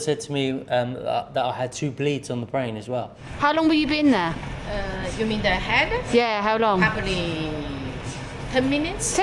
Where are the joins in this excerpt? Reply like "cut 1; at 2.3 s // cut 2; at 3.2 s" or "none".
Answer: cut 1; at 3.2 s

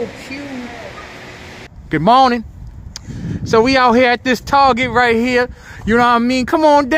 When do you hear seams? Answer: cut 1; at 1.8 s

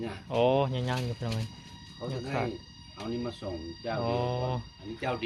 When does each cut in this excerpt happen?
none

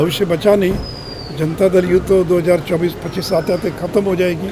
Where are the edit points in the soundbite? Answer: none

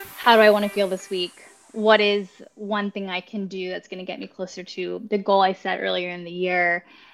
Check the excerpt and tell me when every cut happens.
none

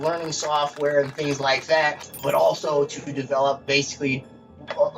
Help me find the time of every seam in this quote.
cut 1; at 2.1 s

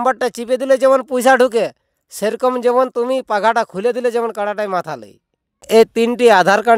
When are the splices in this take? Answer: cut 1; at 5.6 s

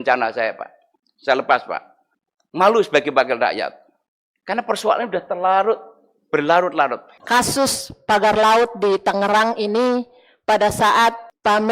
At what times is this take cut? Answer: cut 1; at 7.1 s

